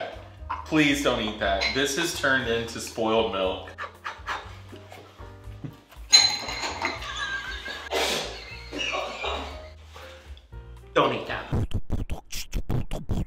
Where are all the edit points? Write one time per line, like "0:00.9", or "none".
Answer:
0:11.5

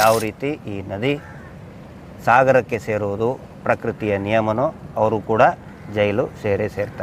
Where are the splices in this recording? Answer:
none

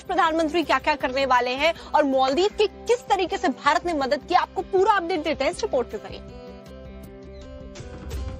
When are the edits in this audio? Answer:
0:03.4

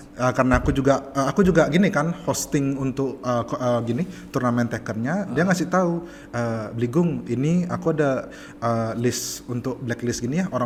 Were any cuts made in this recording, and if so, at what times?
none

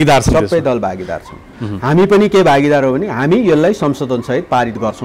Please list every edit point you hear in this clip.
none

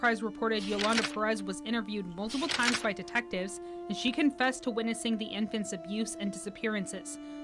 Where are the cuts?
none

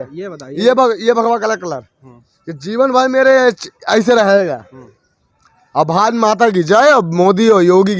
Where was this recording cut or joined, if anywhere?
none

